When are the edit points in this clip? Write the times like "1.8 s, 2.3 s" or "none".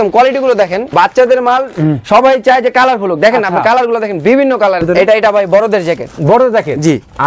0.9 s, 4.8 s